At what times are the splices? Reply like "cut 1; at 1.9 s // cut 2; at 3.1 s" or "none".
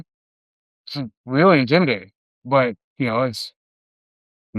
none